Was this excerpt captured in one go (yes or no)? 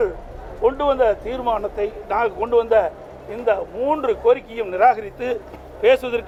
yes